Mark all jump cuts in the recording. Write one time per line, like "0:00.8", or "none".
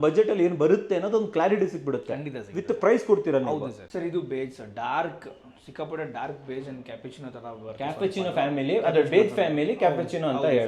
0:03.8